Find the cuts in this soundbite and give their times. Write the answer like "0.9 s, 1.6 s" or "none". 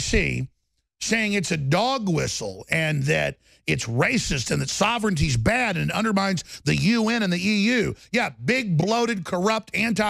none